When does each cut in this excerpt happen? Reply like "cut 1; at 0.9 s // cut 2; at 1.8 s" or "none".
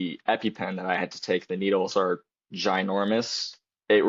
none